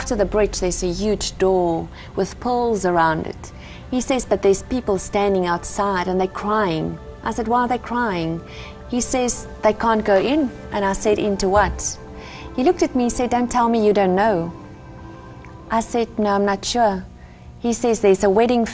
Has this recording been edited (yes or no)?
no